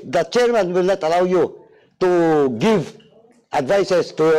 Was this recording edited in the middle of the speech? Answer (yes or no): no